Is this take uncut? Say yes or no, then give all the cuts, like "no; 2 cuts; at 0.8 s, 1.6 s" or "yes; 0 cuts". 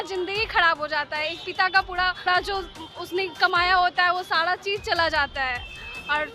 no; 1 cut; at 2.2 s